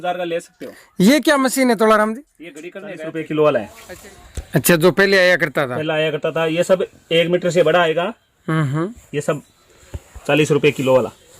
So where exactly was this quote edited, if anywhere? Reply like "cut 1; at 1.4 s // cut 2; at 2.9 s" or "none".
cut 1; at 3.1 s